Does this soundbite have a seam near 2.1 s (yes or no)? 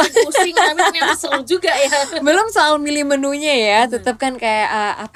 no